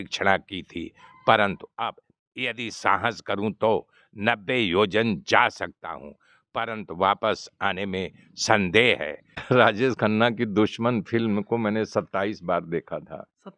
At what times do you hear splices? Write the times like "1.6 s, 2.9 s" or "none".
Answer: 9.4 s